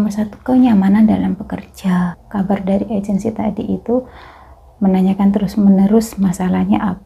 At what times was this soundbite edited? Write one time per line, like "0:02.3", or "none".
0:02.2